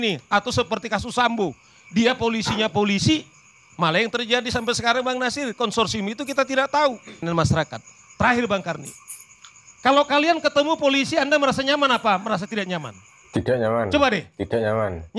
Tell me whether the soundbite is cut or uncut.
cut